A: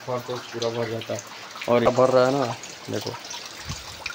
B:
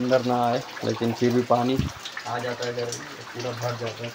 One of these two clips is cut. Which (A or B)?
A